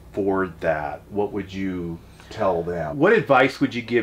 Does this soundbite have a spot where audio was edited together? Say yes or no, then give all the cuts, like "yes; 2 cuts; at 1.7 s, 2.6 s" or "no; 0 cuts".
yes; 1 cut; at 2.9 s